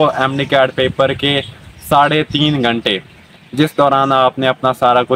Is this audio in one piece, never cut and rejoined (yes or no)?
yes